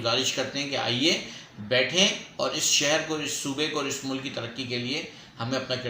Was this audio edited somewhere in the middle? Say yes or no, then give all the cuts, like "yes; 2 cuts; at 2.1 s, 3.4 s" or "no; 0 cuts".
no; 0 cuts